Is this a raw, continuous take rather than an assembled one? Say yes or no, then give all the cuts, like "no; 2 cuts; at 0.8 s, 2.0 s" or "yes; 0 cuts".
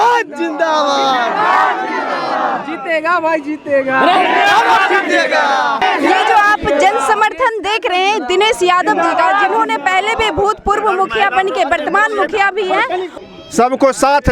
no; 2 cuts; at 5.8 s, 13.2 s